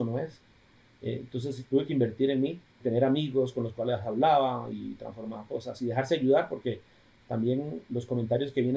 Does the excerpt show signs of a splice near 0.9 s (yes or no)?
no